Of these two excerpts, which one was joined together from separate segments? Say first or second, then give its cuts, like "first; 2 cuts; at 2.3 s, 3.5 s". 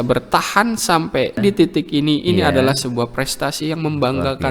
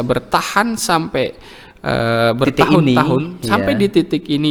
first; 1 cut; at 1.4 s